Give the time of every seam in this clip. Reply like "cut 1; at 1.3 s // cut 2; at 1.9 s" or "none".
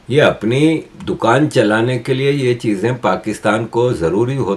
none